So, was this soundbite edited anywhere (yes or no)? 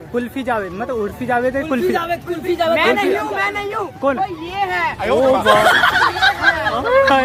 no